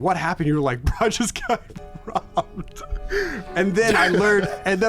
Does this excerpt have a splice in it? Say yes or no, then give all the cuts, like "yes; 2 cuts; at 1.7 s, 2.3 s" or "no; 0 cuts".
no; 0 cuts